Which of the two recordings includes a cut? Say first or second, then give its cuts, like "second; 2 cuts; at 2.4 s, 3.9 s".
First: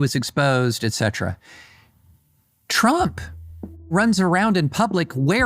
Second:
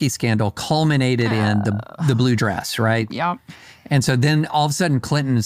first; 1 cut; at 3.9 s